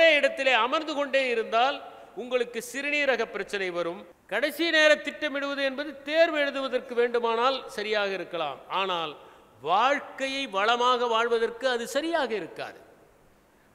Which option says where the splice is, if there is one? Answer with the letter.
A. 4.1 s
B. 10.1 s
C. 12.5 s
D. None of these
A